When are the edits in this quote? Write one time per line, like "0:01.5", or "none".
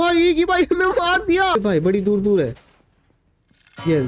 0:01.5